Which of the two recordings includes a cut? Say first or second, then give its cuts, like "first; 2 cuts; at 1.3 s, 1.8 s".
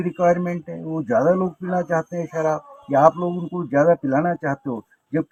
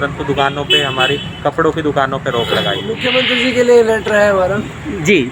second; 1 cut; at 2.9 s